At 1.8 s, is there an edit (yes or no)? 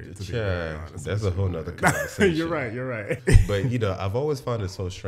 no